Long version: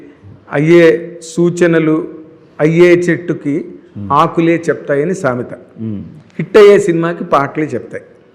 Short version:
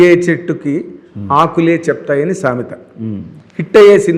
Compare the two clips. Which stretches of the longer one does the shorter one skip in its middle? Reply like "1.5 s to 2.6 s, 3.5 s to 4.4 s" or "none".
none